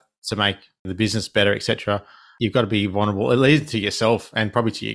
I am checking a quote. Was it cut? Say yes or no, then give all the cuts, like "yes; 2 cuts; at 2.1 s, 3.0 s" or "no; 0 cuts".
yes; 2 cuts; at 0.9 s, 2.2 s